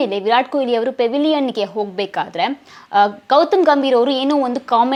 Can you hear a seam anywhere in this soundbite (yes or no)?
no